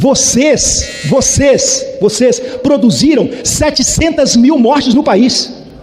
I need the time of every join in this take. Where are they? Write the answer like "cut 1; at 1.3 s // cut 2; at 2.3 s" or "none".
none